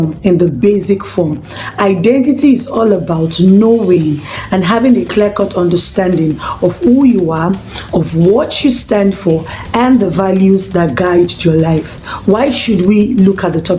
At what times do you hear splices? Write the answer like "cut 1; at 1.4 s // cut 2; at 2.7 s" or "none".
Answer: cut 1; at 12.0 s